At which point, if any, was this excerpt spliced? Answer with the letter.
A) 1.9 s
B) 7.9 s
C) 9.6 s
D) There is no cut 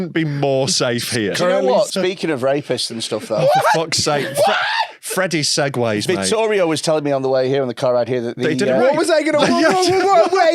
A